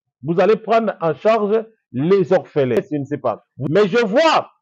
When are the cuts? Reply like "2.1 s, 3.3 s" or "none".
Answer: 2.8 s